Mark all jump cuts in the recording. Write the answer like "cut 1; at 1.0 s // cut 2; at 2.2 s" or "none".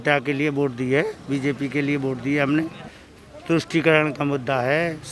cut 1; at 2.8 s